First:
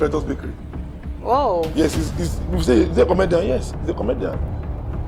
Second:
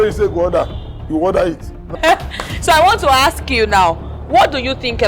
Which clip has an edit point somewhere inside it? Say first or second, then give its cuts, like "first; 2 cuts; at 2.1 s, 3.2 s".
second; 1 cut; at 2.0 s